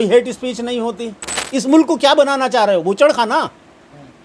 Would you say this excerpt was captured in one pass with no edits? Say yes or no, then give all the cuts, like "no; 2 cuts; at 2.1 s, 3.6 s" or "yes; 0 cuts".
no; 1 cut; at 1.4 s